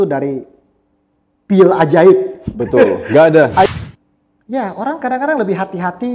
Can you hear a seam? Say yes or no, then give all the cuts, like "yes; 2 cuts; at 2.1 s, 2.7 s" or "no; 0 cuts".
yes; 1 cut; at 3.6 s